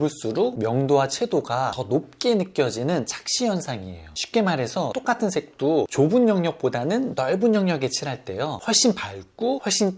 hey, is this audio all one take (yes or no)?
yes